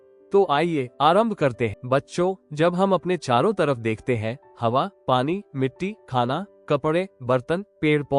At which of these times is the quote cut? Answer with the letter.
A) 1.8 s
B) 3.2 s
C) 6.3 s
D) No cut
A